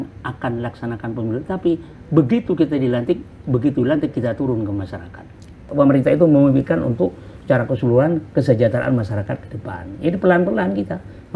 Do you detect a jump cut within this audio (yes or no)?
yes